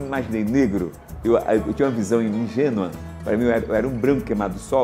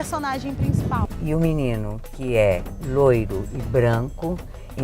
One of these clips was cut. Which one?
second; 1 cut; at 1.1 s

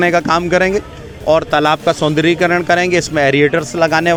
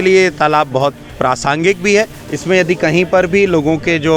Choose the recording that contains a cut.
second; 1 cut; at 2.2 s

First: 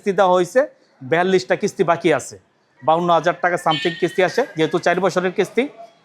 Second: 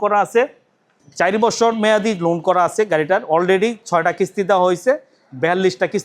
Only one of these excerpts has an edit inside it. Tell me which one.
first; 1 cut; at 2.7 s

